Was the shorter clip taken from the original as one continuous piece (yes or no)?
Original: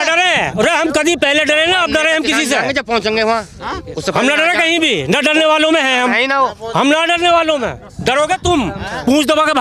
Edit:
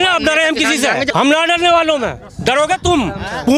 no